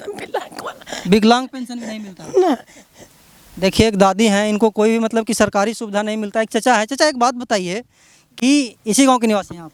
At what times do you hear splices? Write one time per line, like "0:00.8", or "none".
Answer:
none